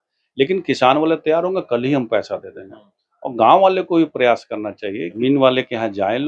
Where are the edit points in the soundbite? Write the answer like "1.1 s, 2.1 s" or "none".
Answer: 5.2 s